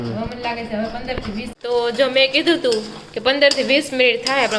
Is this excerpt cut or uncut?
cut